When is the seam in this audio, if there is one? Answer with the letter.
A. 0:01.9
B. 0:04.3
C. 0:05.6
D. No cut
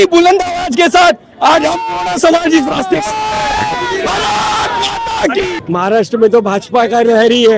C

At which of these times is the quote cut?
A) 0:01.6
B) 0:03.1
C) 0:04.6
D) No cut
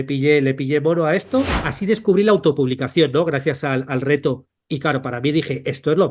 A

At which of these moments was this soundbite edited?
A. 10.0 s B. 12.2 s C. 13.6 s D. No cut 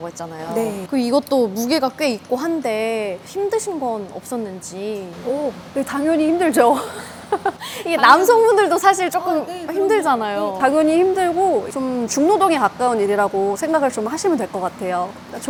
D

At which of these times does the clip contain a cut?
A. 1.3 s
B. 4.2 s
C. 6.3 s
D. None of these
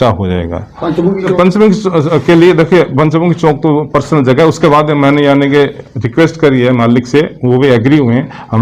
A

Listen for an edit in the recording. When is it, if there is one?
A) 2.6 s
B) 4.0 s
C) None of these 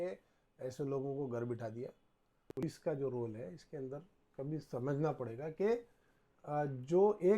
A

